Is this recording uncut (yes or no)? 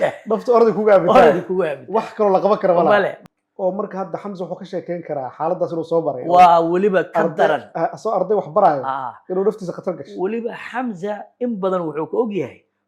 no